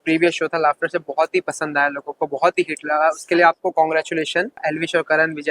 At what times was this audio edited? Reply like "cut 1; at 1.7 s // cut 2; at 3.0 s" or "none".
cut 1; at 4.6 s